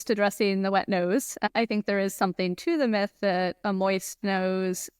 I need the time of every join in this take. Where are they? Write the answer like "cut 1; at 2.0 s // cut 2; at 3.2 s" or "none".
cut 1; at 1.5 s